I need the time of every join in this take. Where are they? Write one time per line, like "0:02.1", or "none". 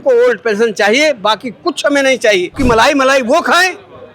0:02.5